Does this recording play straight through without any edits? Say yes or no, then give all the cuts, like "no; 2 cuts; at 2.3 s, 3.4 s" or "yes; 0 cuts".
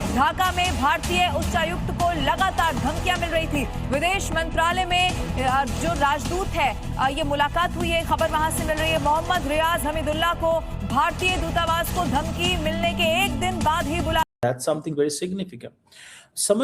no; 1 cut; at 14.3 s